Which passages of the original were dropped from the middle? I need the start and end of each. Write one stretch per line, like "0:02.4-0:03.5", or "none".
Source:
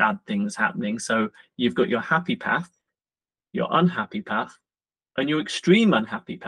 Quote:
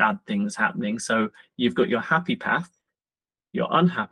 none